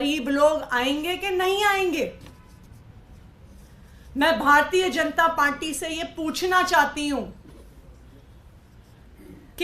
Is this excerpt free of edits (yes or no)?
yes